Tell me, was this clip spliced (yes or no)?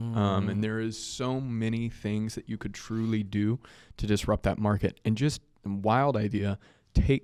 no